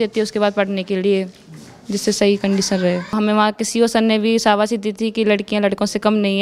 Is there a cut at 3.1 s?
yes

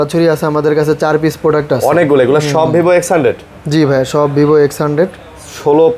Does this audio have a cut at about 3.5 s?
no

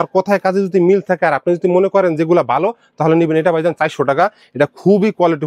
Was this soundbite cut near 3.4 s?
no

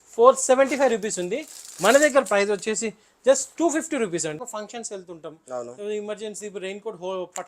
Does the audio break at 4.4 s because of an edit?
yes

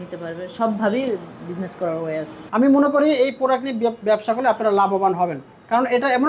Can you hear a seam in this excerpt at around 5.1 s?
no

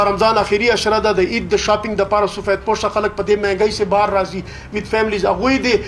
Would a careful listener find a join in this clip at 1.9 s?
no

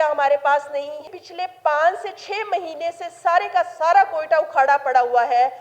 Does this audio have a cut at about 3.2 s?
no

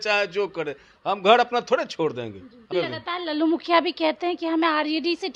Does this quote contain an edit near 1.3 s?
no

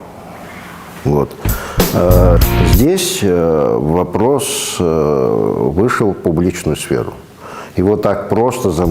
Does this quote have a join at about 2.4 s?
yes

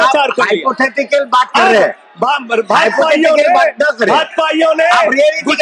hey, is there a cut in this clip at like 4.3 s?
no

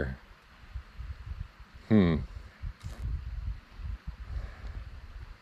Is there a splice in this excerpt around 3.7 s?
no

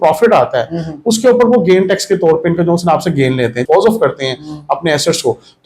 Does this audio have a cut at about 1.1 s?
no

